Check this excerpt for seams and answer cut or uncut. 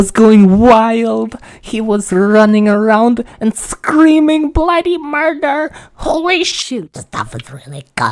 uncut